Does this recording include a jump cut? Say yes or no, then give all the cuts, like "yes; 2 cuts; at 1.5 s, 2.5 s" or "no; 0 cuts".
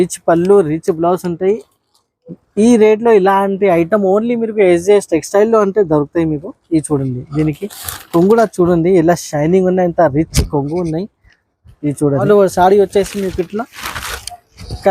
yes; 1 cut; at 12.2 s